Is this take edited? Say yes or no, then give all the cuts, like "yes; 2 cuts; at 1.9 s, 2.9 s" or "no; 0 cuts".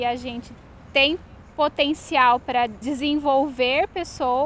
yes; 1 cut; at 2.8 s